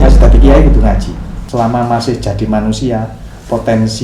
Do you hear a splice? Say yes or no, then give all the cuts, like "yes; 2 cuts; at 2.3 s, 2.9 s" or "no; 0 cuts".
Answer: yes; 1 cut; at 1.3 s